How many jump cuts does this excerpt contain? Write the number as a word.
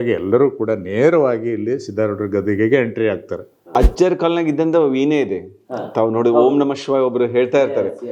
one